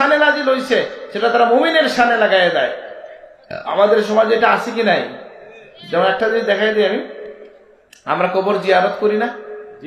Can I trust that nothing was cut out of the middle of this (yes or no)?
yes